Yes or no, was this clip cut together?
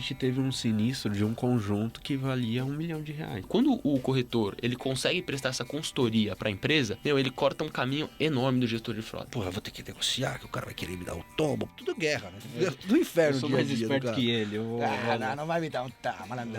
yes